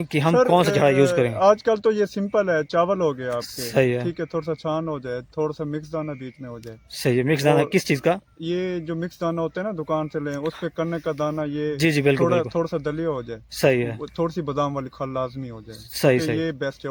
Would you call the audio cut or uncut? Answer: uncut